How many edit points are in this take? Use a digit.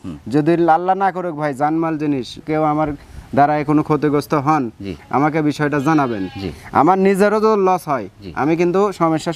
1